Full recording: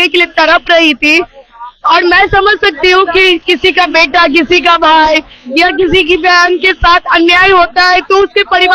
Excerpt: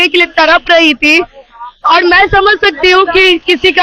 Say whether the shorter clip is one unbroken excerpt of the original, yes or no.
yes